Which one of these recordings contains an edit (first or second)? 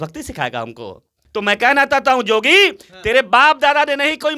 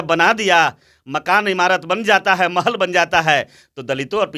first